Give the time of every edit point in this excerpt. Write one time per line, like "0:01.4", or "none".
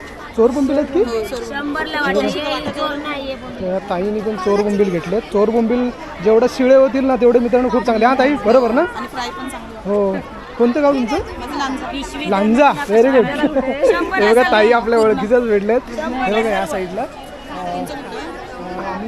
none